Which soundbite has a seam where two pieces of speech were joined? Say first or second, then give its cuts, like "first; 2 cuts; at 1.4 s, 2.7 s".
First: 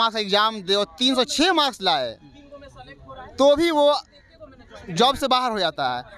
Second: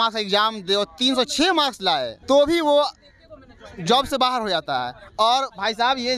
second; 1 cut; at 2.1 s